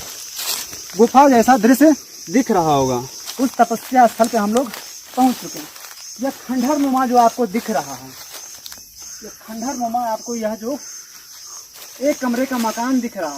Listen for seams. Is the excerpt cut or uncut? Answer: cut